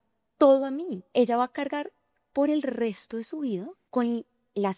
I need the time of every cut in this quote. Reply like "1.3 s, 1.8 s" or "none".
1.0 s, 3.8 s